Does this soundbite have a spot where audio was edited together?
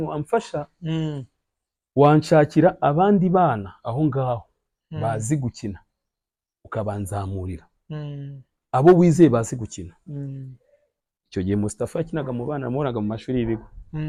no; 0 cuts

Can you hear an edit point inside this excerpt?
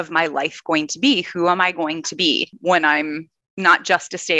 yes; 1 cut; at 2.5 s

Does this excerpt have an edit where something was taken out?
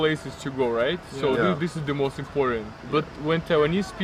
no; 0 cuts

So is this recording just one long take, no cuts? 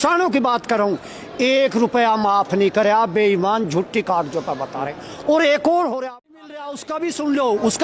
no; 1 cut; at 6.1 s

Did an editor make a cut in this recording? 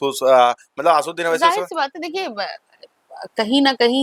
no; 0 cuts

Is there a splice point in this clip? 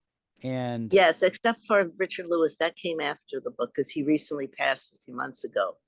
no; 0 cuts

